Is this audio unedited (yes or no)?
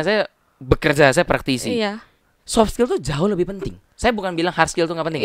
yes